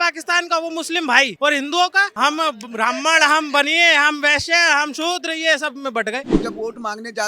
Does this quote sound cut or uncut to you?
cut